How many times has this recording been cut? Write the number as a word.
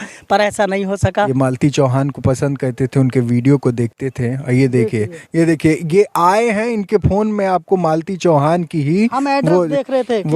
one